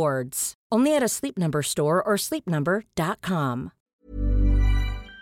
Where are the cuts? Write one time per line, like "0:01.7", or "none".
0:03.8